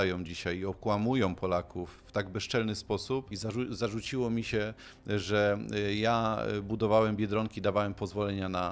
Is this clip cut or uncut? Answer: cut